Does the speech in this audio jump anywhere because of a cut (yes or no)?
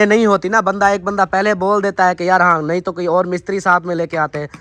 no